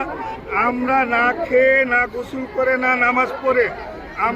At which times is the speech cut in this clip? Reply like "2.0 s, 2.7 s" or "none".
none